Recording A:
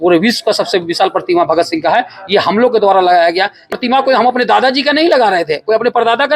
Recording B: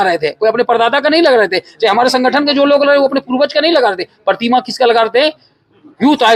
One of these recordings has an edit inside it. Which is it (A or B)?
A